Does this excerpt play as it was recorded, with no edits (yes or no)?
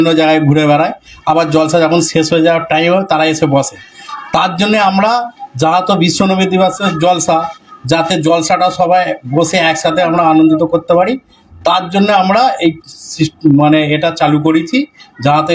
yes